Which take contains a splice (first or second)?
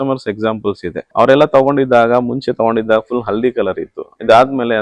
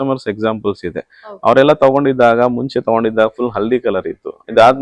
first